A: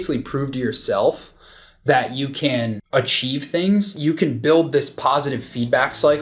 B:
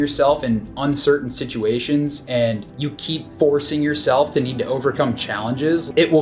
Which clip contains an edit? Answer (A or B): A